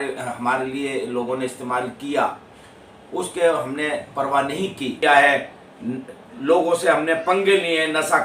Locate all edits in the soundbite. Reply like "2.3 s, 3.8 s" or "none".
5.0 s